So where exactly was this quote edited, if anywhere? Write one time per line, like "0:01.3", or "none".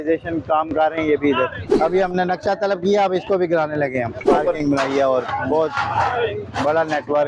0:01.6
0:04.2